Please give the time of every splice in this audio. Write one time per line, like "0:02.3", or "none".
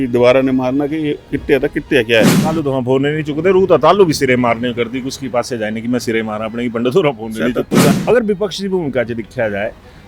0:07.9